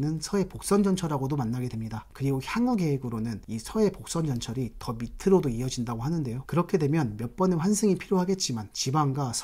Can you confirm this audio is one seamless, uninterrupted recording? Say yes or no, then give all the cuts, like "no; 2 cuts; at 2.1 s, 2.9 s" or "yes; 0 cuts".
yes; 0 cuts